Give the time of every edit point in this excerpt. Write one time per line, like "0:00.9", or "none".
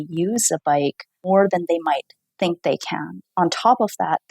0:01.1
0:03.2